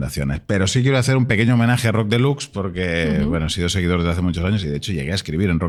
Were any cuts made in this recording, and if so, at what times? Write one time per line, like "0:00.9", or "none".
none